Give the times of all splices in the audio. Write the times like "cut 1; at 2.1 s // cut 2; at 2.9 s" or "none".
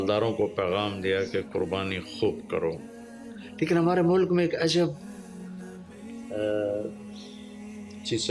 none